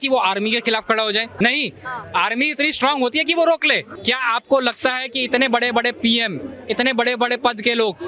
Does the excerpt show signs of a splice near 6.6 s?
no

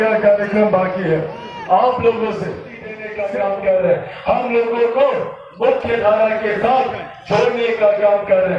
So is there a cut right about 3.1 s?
yes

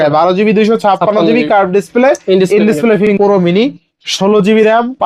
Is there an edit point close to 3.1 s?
yes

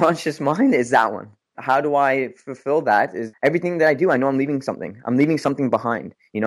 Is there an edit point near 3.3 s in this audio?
yes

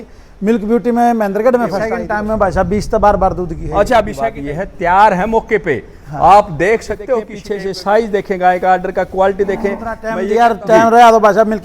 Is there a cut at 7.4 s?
yes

